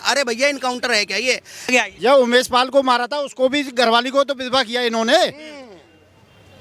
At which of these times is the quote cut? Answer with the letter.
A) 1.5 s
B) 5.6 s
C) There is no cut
A